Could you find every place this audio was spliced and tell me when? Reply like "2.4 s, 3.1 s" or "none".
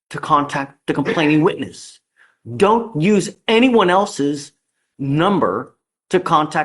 none